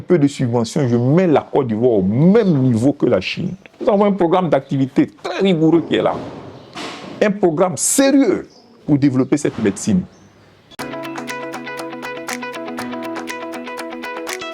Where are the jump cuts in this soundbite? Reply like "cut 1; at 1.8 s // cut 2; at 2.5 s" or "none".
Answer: cut 1; at 10.7 s

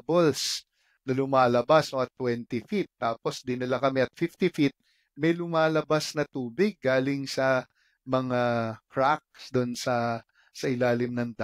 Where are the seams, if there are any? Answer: none

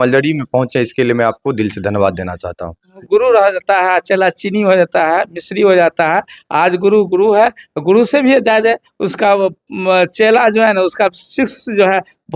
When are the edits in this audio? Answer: cut 1; at 3.0 s

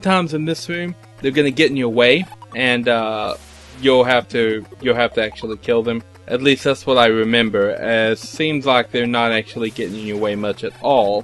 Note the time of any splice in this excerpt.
cut 1; at 2.4 s // cut 2; at 6.1 s

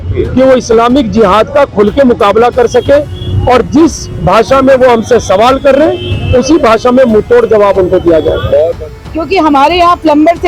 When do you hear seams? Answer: cut 1; at 9.0 s

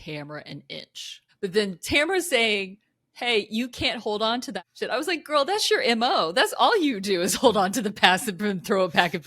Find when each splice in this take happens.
cut 1; at 1.2 s

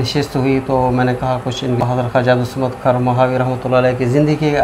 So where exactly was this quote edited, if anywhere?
cut 1; at 1.9 s

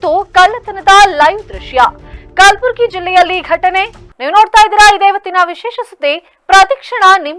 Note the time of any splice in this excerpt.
none

